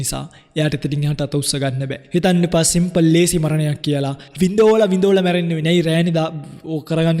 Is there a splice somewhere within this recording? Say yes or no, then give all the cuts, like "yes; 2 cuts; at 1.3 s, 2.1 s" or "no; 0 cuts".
yes; 2 cuts; at 2.0 s, 4.3 s